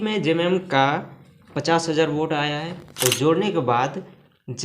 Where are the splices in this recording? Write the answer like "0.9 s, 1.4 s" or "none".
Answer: 2.9 s